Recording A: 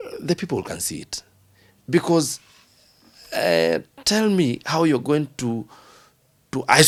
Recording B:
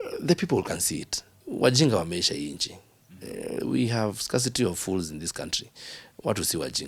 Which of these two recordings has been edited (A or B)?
B